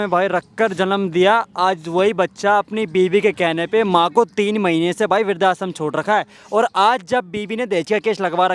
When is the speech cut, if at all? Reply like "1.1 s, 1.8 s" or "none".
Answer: none